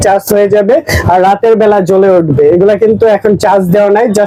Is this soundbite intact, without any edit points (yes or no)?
yes